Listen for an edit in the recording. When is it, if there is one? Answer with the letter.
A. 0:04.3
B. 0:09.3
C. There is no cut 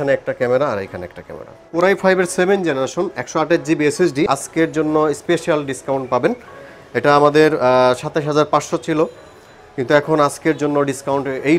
A